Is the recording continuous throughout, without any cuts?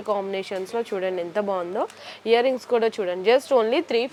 yes; 0 cuts

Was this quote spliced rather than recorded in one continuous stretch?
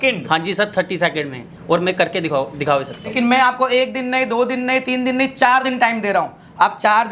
yes; 1 cut; at 3.1 s

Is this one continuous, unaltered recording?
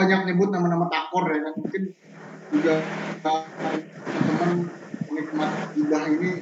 yes; 0 cuts

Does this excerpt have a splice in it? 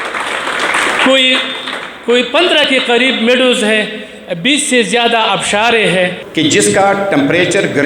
yes; 1 cut; at 6.2 s

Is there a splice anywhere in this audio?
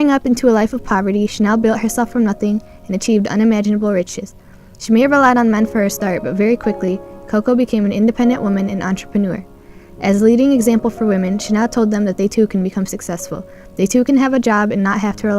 yes; 1 cut; at 4.7 s

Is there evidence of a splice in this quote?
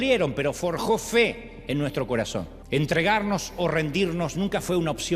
yes; 1 cut; at 2.6 s

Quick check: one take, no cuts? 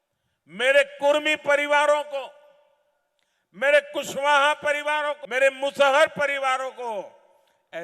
no; 1 cut; at 5.2 s

